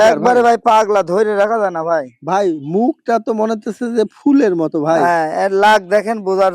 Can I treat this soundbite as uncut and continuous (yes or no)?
yes